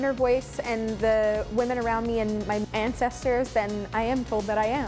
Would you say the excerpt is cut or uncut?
cut